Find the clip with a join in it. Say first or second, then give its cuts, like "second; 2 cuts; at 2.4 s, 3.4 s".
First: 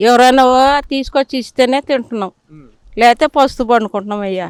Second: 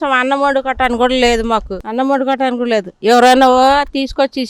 second; 1 cut; at 1.8 s